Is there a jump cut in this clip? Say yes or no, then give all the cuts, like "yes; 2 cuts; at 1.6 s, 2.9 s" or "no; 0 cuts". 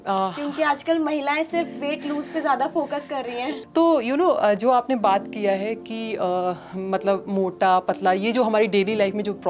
yes; 1 cut; at 3.6 s